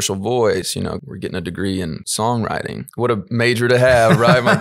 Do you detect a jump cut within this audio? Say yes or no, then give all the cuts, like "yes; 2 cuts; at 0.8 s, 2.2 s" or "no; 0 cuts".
yes; 3 cuts; at 1.0 s, 2.0 s, 2.8 s